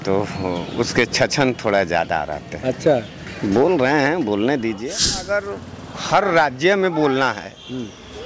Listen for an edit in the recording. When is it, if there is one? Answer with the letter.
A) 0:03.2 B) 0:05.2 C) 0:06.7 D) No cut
B